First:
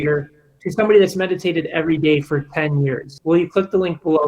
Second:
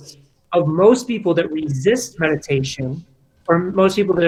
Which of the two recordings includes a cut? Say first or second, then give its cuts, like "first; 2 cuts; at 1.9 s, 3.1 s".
first; 1 cut; at 3.1 s